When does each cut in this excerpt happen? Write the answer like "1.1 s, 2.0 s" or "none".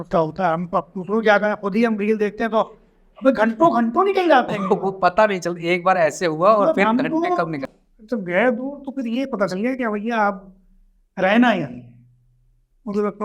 7.6 s